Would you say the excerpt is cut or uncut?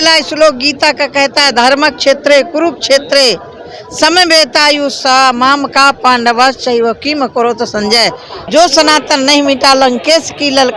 cut